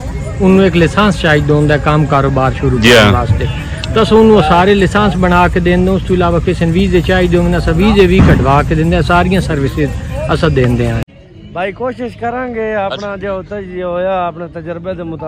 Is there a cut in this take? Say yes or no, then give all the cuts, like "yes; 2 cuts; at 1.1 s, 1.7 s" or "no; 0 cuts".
yes; 1 cut; at 11.0 s